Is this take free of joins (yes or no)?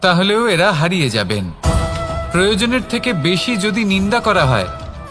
yes